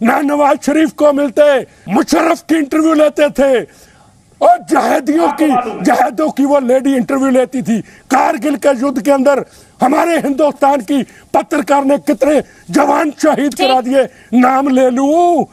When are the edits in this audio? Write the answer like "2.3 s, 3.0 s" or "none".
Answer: 1.8 s